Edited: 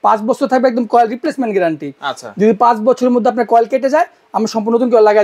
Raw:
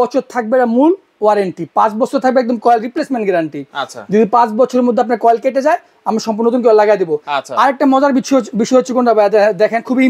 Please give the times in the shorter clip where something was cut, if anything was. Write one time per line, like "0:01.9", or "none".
none